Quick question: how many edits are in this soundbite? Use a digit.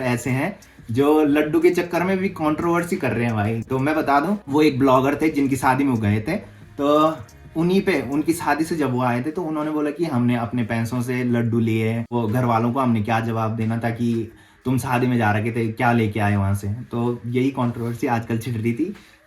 0